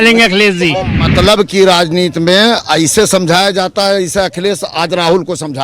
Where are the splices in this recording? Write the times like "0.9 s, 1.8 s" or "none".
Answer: 1.0 s